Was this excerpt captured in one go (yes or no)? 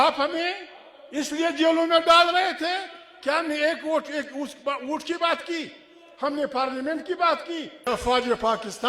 no